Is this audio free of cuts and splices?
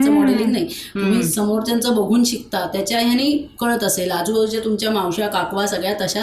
yes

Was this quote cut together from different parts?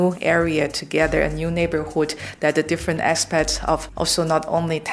yes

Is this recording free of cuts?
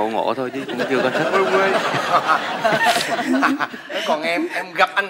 yes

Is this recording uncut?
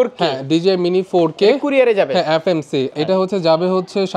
no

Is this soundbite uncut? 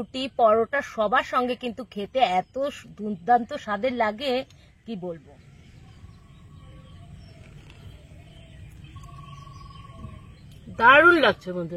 no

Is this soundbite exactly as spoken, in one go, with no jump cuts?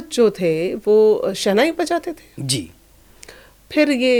yes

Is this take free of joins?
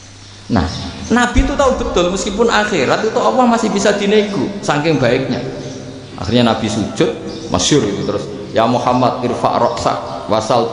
yes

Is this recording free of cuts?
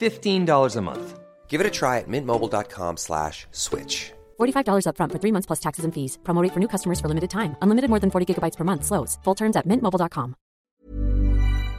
no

